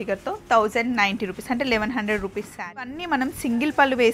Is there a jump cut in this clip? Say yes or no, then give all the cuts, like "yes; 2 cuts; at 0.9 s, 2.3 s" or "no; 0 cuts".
yes; 1 cut; at 3.0 s